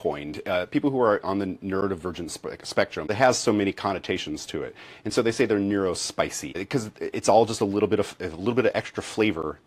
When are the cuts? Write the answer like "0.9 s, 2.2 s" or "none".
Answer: 3.1 s, 6.6 s